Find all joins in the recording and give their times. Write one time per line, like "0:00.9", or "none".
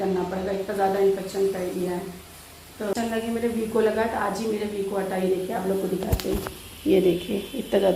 0:02.9